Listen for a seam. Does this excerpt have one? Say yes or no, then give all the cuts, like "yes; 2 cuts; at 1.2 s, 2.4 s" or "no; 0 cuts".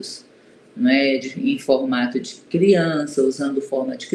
no; 0 cuts